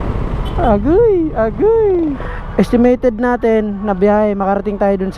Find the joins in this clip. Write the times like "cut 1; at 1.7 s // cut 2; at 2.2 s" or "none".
cut 1; at 2.3 s

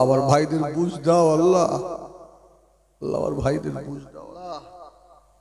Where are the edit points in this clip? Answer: cut 1; at 4.3 s

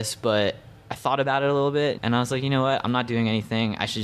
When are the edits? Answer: cut 1; at 2.0 s

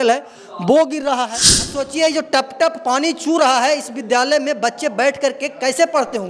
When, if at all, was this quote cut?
cut 1; at 1.8 s

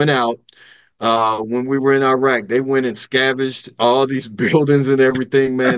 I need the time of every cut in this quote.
none

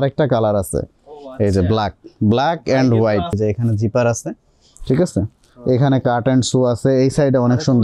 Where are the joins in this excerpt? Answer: cut 1; at 3.4 s

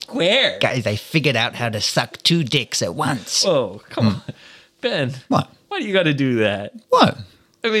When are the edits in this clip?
none

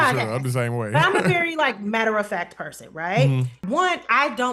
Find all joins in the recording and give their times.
cut 1; at 3.6 s

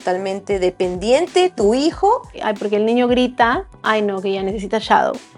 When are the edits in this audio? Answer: cut 1; at 2.4 s

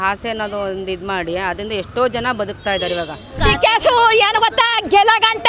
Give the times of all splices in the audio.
cut 1; at 3.4 s

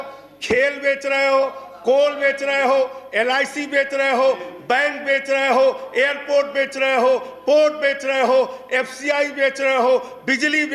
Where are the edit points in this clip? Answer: none

